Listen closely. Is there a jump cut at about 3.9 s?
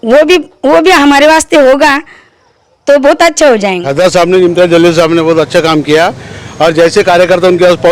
yes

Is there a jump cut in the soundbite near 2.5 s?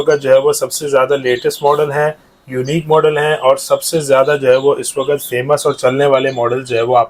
no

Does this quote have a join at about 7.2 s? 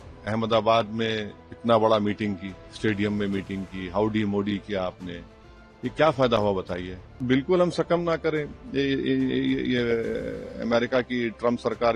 yes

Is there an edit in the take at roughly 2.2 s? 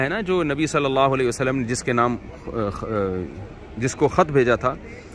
no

